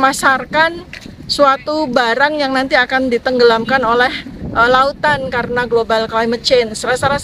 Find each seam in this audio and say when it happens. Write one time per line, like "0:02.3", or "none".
none